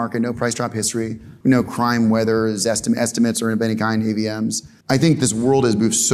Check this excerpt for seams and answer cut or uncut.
cut